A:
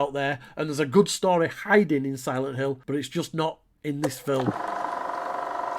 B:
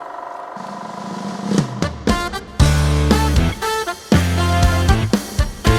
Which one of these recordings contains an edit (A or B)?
A